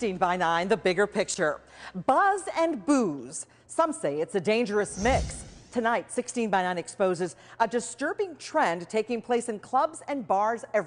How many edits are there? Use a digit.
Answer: 1